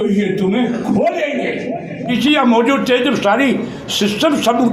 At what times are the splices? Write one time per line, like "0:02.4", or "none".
0:02.1